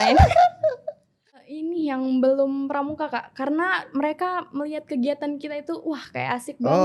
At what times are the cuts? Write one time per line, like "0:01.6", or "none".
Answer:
0:01.3